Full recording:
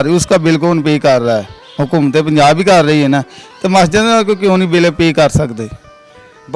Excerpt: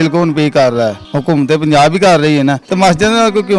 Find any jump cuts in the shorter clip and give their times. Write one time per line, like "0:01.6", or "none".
0:01.1
0:02.6